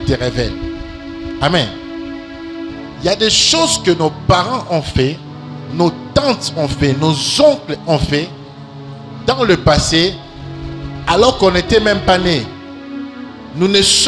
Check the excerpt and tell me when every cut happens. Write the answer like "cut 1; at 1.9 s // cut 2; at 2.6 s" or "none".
none